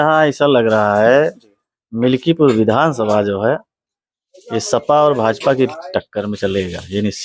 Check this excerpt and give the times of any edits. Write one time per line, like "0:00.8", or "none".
none